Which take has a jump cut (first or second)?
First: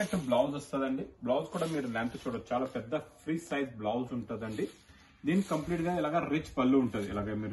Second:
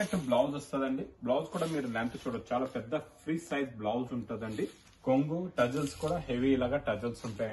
second